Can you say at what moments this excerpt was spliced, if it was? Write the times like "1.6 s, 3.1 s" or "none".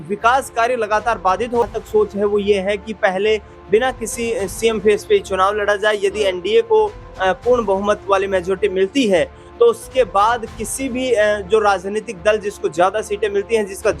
1.6 s